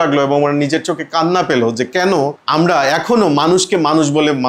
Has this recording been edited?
no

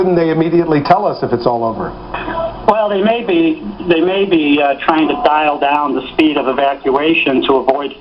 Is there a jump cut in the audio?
yes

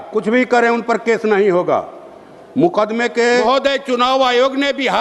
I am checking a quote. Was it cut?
yes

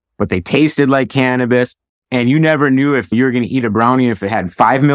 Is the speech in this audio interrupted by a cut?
yes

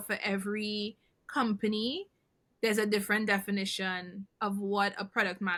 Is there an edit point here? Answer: no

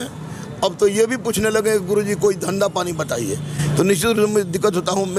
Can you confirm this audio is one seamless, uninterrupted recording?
yes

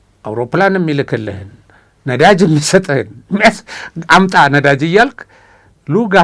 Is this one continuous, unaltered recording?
yes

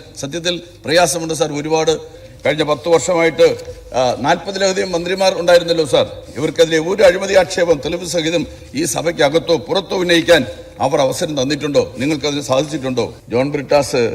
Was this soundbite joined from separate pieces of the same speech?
yes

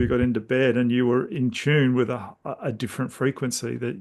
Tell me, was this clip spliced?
no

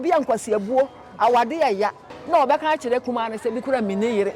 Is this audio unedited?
no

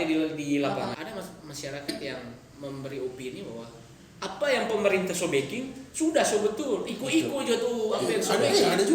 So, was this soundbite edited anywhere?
yes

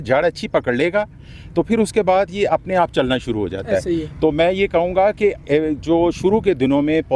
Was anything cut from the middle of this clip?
no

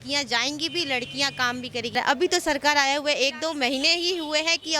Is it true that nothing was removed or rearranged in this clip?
no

